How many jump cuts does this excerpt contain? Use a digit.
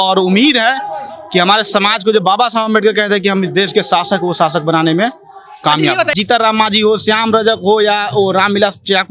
1